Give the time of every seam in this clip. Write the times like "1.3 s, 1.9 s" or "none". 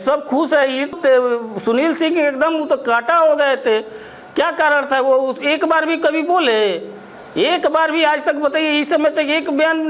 0.9 s